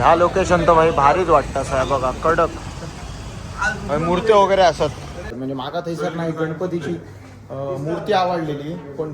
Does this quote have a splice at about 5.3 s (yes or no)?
yes